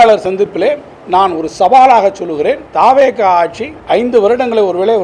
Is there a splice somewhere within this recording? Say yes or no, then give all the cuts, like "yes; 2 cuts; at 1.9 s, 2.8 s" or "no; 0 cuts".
yes; 3 cuts; at 0.9 s, 2.7 s, 3.7 s